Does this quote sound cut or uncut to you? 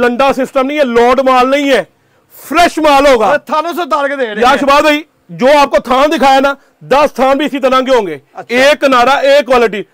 uncut